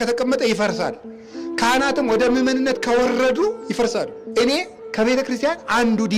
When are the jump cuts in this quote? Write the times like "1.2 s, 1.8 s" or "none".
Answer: 4.2 s